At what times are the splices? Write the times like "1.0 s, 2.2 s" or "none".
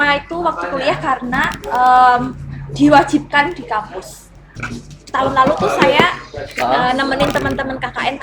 4.6 s